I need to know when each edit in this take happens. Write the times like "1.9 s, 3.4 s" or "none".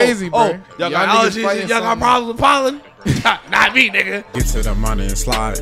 4.2 s